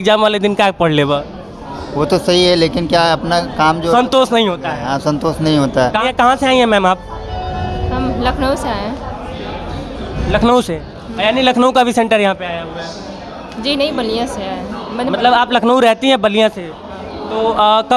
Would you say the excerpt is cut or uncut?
cut